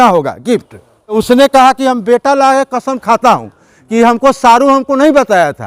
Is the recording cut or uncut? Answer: cut